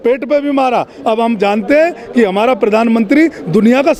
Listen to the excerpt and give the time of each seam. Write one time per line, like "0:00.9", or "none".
none